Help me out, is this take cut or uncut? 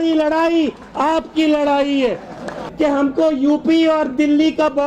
cut